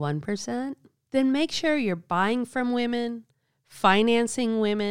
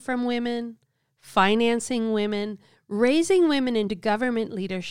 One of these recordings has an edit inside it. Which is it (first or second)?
first